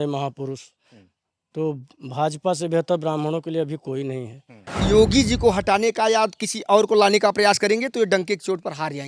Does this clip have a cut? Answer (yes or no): yes